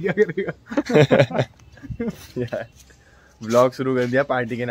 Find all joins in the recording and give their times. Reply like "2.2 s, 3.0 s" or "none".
1.1 s